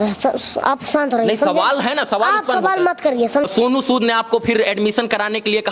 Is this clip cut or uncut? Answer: cut